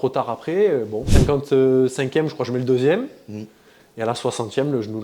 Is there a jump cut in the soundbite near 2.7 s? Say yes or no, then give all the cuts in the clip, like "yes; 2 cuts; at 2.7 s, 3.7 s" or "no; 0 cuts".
no; 1 cut; at 1.0 s